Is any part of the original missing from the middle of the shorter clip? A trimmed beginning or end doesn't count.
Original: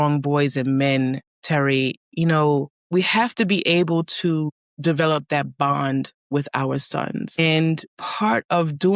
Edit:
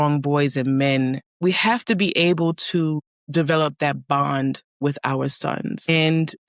yes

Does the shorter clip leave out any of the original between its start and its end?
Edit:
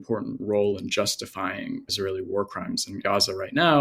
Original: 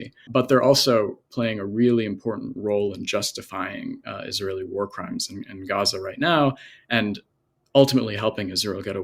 yes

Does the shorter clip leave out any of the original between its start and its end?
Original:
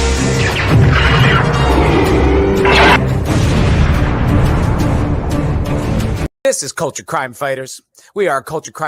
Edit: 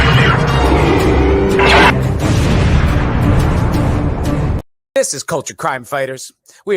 yes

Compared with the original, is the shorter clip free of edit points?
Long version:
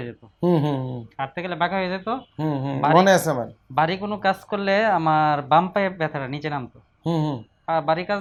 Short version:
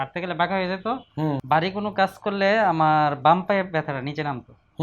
no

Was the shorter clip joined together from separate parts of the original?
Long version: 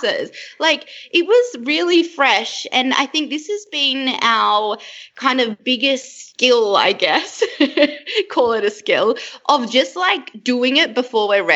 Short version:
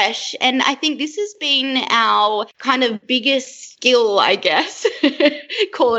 yes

